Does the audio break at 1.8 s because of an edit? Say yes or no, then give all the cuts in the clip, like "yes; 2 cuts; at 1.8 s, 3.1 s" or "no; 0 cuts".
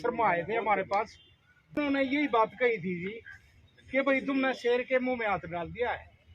yes; 1 cut; at 1.8 s